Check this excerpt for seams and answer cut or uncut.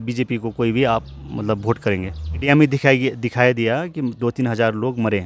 cut